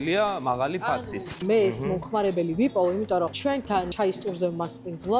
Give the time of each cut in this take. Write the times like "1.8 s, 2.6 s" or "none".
1.3 s, 3.9 s